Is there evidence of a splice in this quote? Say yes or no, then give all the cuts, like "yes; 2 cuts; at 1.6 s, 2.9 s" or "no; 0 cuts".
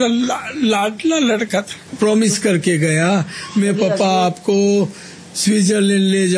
yes; 1 cut; at 1.9 s